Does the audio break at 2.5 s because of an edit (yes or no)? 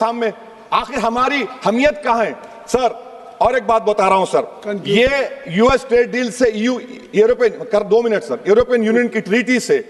no